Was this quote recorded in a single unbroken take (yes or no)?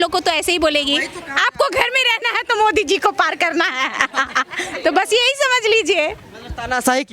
yes